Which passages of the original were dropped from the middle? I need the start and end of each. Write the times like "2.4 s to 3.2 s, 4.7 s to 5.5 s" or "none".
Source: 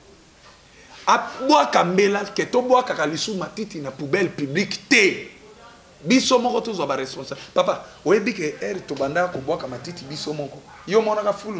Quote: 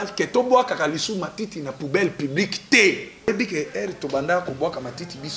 5.5 s to 8.2 s